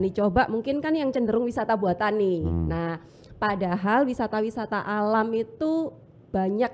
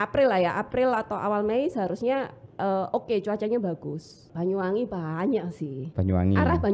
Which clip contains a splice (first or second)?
second